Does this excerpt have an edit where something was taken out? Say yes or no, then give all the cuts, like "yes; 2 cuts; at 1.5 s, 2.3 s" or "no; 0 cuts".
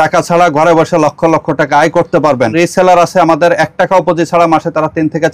yes; 1 cut; at 2.5 s